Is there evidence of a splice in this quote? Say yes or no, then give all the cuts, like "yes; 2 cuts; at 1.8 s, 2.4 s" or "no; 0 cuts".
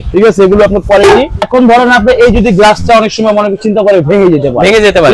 yes; 1 cut; at 1.5 s